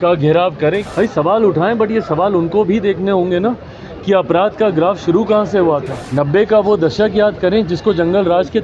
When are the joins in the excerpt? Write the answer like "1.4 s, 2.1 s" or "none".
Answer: 0.8 s, 6.0 s